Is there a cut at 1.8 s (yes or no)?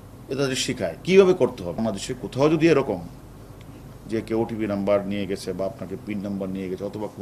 yes